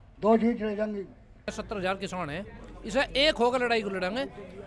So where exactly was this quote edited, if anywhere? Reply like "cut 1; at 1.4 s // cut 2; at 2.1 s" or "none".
cut 1; at 1.5 s